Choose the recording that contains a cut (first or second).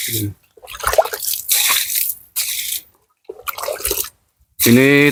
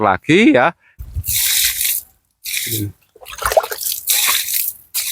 second